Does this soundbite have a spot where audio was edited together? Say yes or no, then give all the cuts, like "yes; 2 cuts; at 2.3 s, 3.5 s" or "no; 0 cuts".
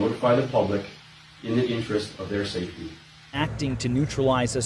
yes; 1 cut; at 3.2 s